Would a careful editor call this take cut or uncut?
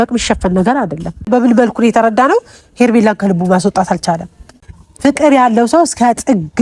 cut